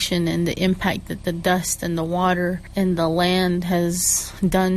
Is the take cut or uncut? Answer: cut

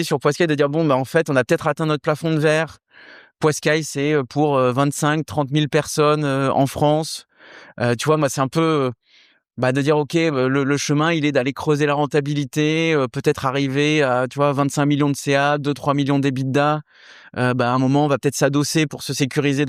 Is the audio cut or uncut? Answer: uncut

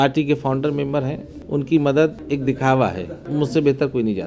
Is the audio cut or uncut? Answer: cut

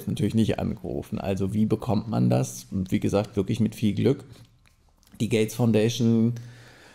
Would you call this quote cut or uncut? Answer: uncut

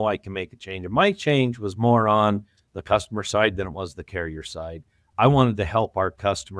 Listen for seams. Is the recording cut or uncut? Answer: uncut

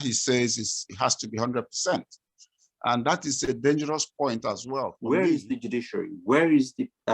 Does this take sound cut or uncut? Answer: cut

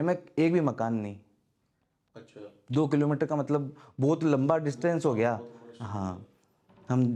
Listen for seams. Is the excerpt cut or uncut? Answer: uncut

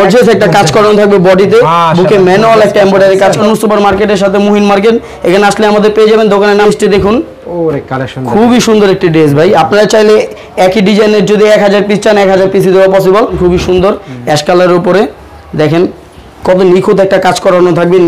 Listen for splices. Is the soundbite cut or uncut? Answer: cut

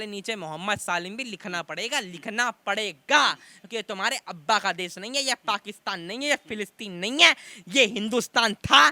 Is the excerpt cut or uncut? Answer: uncut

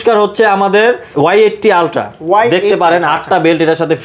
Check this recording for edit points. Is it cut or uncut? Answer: cut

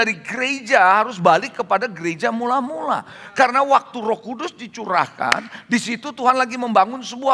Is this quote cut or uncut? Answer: uncut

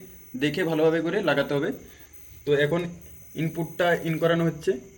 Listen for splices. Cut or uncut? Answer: uncut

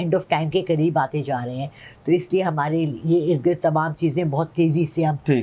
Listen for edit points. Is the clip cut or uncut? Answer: uncut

